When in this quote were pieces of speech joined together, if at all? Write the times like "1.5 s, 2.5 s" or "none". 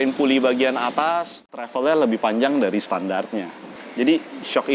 1.5 s

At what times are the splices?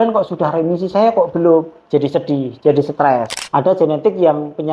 3.4 s

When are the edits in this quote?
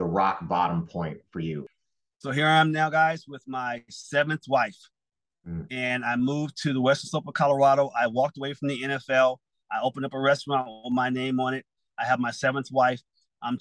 1.6 s

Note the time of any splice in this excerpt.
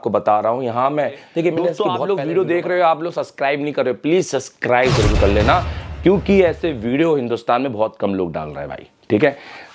1.9 s

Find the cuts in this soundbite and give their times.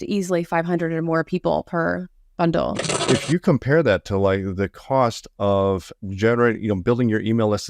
2.9 s

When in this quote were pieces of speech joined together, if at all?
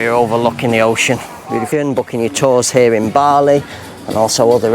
1.7 s

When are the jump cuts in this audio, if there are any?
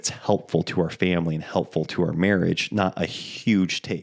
none

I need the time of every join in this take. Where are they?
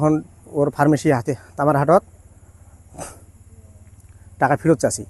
none

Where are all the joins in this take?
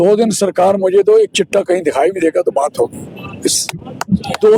none

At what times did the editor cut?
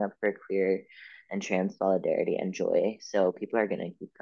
none

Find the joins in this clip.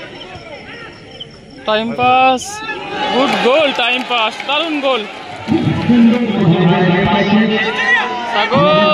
6.3 s

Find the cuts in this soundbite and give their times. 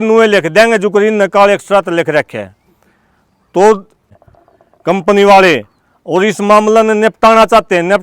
4.1 s

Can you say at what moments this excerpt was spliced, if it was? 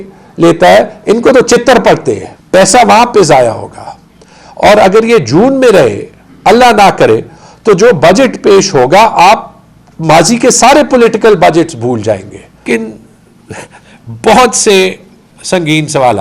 2.3 s, 12.6 s

